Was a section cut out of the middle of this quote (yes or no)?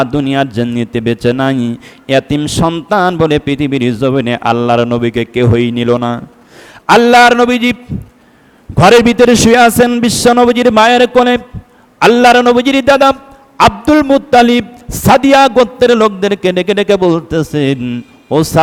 no